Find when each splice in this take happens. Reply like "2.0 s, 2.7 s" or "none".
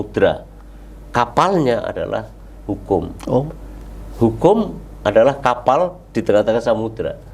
none